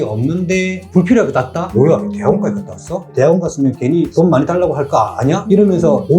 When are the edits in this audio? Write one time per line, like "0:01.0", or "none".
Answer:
0:01.6